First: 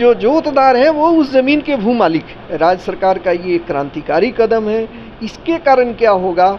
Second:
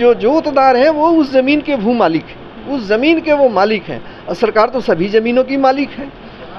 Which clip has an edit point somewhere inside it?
first; 1 cut; at 2.4 s

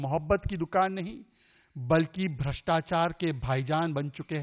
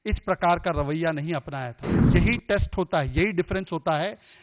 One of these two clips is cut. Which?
second; 1 cut; at 2.1 s

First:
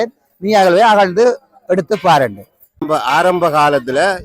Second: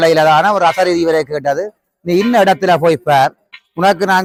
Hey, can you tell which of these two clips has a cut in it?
first; 1 cut; at 2.8 s

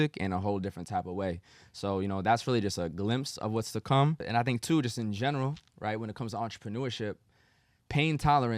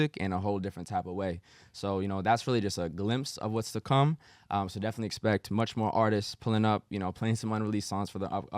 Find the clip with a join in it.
first; 1 cut; at 4.2 s

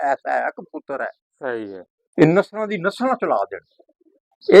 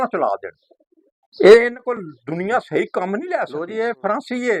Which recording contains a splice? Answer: second; 1 cut; at 3.5 s

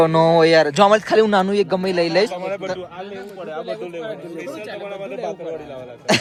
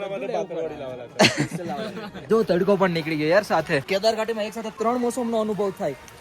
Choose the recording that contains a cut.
second; 3 cuts; at 2.3 s, 3.8 s, 4.6 s

